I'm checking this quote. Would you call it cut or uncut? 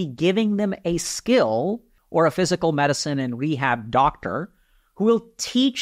cut